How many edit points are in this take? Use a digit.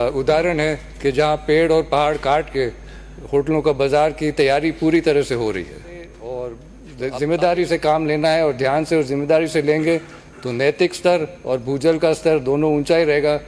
1